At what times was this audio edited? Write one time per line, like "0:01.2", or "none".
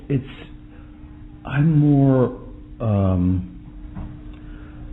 0:01.6

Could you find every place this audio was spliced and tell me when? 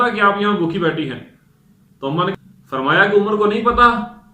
0:02.3

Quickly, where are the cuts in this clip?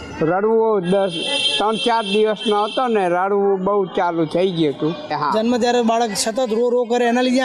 0:05.2

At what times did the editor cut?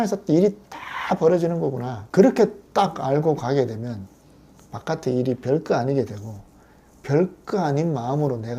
0:01.9

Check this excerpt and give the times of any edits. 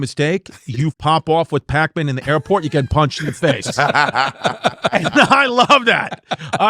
0:01.0

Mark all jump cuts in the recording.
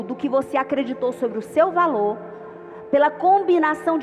none

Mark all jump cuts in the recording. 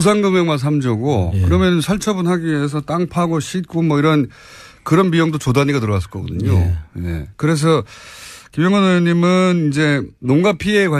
0:08.1

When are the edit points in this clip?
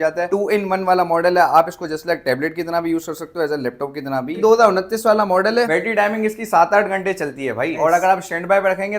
0:04.4
0:05.7

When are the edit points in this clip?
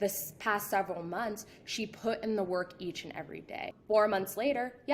0:03.7

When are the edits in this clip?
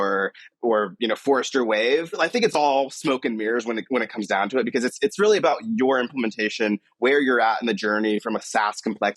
0:02.2
0:08.4

